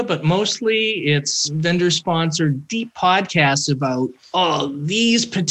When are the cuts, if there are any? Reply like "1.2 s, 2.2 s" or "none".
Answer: 1.5 s, 4.2 s